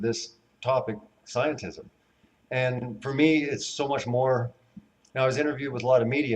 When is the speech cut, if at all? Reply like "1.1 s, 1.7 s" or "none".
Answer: 2.5 s